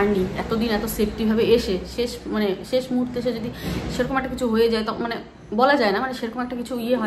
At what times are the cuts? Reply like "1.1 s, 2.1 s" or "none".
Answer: none